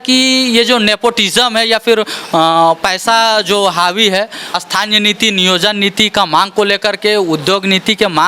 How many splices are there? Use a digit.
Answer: 1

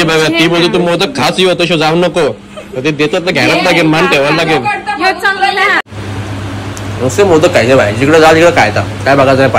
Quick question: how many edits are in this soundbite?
1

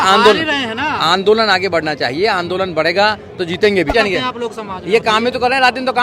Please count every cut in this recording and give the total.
1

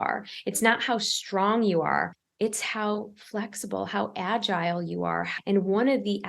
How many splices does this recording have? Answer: 2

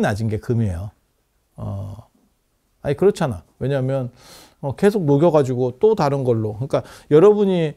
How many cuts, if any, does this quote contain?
0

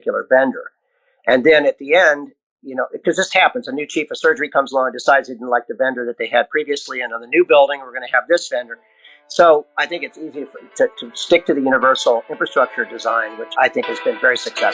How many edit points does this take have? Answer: 1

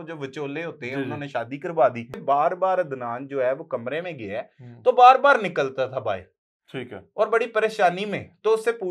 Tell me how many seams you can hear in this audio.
1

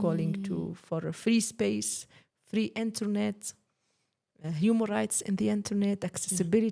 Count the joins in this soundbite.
0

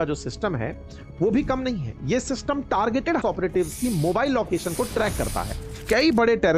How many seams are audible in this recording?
2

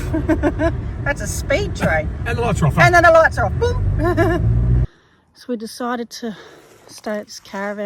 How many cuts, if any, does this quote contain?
1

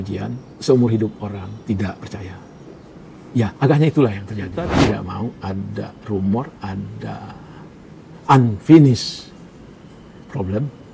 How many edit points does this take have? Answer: 1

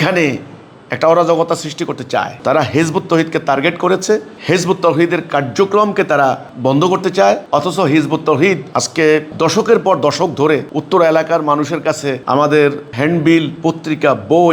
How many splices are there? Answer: 3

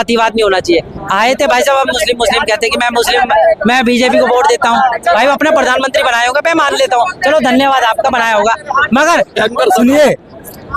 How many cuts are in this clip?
1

